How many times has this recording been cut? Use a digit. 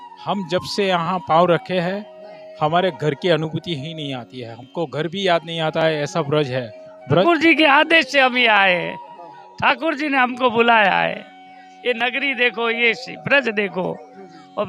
1